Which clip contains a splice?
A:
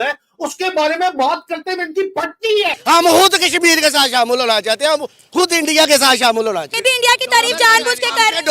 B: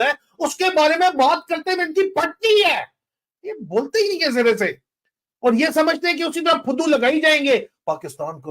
A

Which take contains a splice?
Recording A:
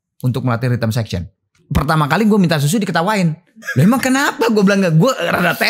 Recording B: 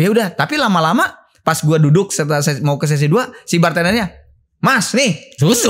A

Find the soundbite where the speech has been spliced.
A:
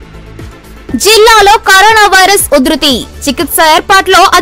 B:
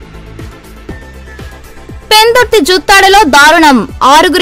B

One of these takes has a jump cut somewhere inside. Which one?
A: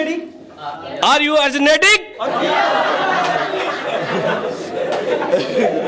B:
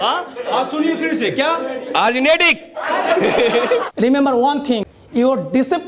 B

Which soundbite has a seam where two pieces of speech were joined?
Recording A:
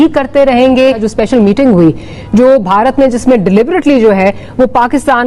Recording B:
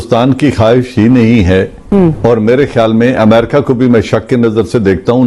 A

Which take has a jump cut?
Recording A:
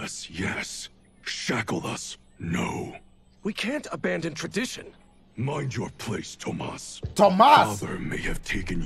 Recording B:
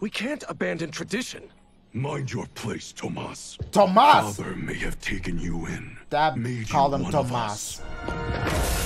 B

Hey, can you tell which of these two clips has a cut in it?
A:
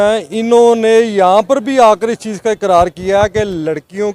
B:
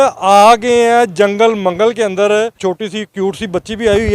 B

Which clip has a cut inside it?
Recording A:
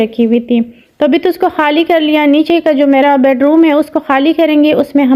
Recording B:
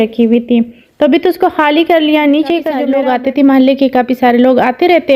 B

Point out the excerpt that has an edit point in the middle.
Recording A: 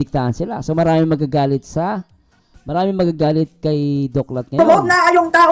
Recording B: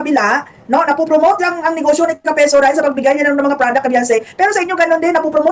A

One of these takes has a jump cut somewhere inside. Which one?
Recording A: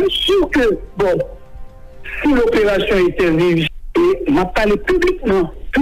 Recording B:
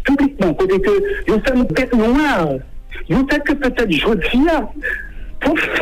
A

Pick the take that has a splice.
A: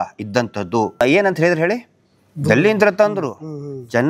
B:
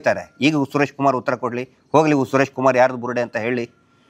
A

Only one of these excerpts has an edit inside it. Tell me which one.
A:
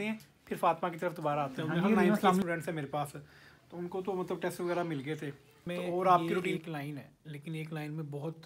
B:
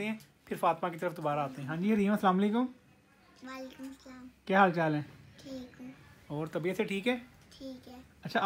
A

